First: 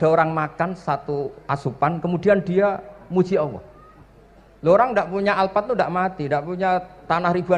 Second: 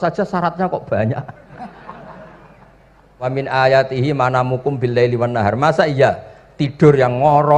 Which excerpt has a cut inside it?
second; 1 cut; at 3.3 s

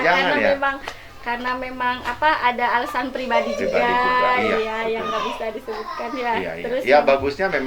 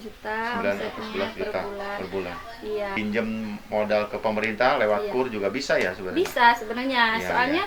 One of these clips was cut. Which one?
second; 1 cut; at 2.9 s

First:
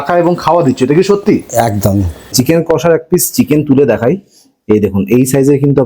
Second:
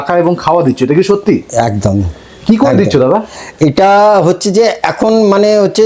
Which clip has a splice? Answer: first; 1 cut; at 2.2 s

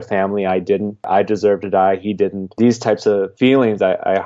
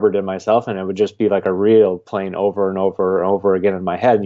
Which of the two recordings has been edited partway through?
first; 3 cuts; at 1.1 s, 2.5 s, 3.3 s

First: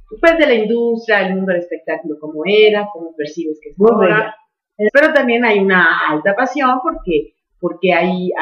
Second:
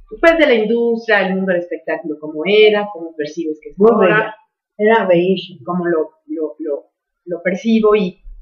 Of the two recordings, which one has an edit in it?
second; 1 cut; at 4.9 s

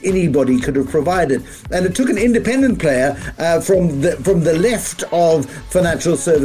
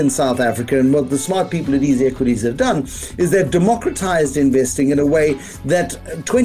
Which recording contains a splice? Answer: second; 1 cut; at 1.1 s

